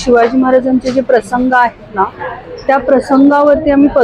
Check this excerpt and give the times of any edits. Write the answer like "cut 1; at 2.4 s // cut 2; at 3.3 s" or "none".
none